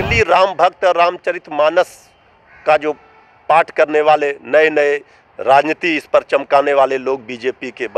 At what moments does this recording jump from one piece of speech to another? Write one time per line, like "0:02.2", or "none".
none